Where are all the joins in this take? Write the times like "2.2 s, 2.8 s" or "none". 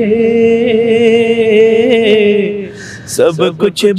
none